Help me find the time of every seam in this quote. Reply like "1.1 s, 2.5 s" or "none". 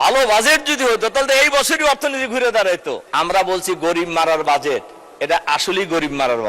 3.0 s